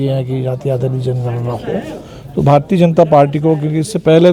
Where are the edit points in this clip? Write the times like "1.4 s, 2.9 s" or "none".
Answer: none